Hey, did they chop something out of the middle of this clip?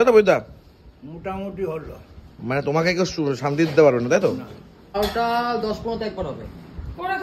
yes; 1 cut; at 4.9 s

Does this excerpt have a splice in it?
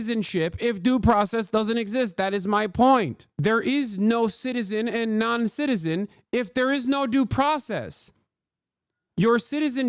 yes; 1 cut; at 3.2 s

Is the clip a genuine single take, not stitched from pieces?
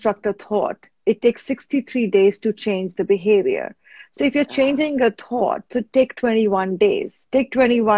yes; 0 cuts

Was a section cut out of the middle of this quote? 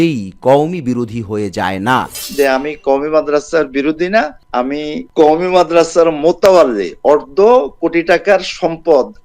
yes; 1 cut; at 2.2 s

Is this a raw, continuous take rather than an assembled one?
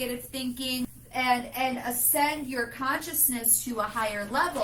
no; 1 cut; at 0.9 s

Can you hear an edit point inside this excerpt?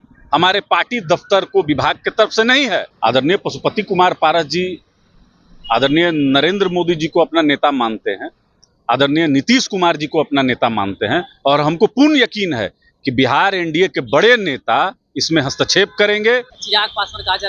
yes; 2 cuts; at 2.9 s, 16.6 s

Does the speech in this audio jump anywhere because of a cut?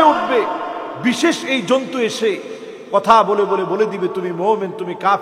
no; 0 cuts

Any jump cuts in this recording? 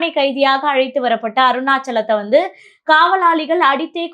no; 0 cuts

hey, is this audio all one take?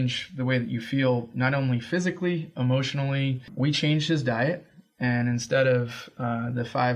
no; 1 cut; at 3.5 s

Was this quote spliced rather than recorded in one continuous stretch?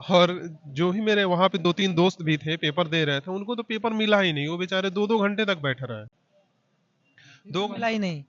no; 0 cuts

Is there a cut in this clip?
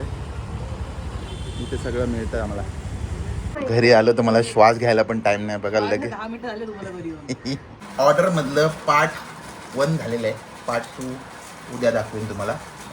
yes; 2 cuts; at 3.5 s, 7.8 s

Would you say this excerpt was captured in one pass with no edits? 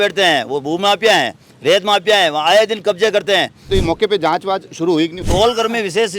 no; 2 cuts; at 3.6 s, 5.2 s

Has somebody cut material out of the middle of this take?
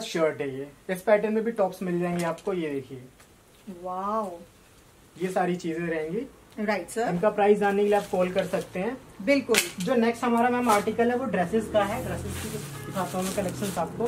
no; 0 cuts

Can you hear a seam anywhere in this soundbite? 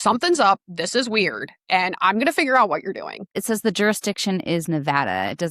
yes; 1 cut; at 3.4 s

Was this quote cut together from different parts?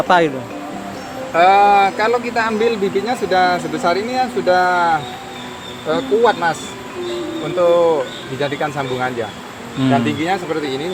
no; 0 cuts

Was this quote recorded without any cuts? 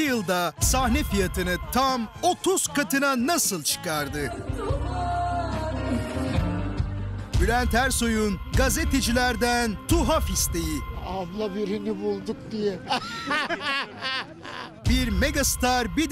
yes; 0 cuts

